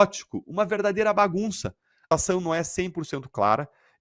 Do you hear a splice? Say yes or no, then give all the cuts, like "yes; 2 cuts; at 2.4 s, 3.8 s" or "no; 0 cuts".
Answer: yes; 1 cut; at 2.1 s